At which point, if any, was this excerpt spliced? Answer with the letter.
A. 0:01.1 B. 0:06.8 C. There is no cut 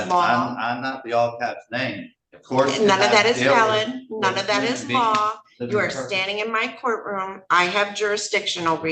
C